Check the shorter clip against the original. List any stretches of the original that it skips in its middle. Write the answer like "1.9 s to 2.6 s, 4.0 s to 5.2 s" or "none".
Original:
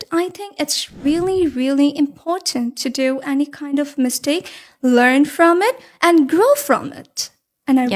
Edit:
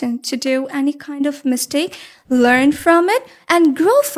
none